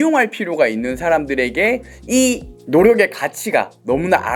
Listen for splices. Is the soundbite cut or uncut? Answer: uncut